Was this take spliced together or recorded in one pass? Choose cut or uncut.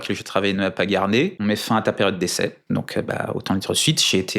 cut